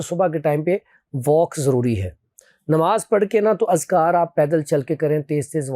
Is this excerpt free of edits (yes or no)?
yes